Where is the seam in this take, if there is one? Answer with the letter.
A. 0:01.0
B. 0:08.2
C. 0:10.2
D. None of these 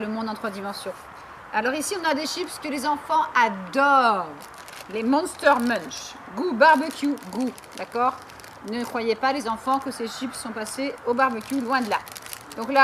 A